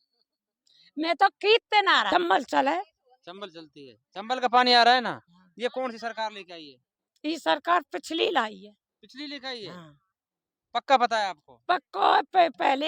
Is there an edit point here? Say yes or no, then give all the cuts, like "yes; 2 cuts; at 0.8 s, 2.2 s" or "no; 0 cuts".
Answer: yes; 1 cut; at 2.1 s